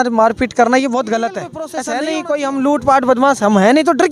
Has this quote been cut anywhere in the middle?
yes; 1 cut; at 1.7 s

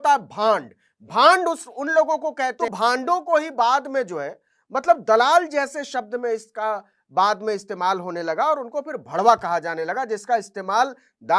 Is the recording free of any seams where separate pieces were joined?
no; 1 cut; at 2.6 s

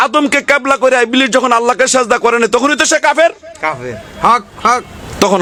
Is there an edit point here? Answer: no; 0 cuts

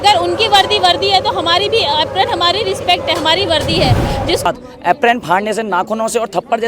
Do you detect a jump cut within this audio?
yes; 1 cut; at 4.5 s

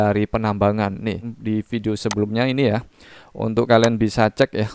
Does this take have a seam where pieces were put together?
yes; 1 cut; at 1.3 s

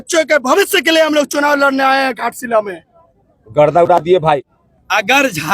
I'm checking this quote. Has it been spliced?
yes; 1 cut; at 4.6 s

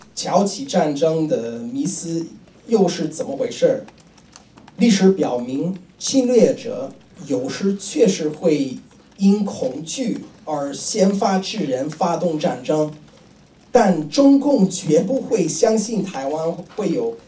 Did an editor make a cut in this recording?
no; 0 cuts

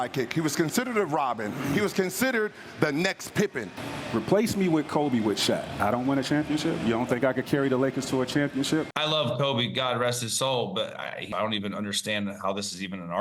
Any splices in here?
yes; 3 cuts; at 3.7 s, 8.9 s, 11.3 s

